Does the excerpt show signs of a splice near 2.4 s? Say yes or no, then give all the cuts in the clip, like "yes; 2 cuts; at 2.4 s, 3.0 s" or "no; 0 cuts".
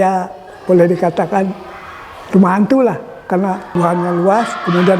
no; 1 cut; at 3.6 s